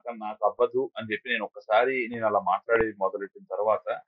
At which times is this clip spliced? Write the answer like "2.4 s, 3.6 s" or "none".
none